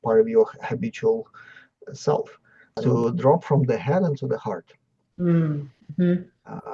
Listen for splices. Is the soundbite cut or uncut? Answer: cut